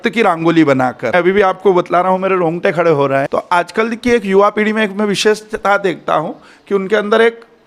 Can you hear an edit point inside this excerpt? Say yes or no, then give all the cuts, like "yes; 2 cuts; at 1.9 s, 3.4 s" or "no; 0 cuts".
yes; 2 cuts; at 1.1 s, 3.3 s